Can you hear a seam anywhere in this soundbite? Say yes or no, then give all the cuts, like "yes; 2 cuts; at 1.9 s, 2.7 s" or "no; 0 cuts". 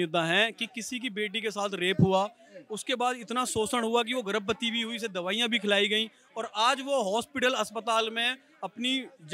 no; 0 cuts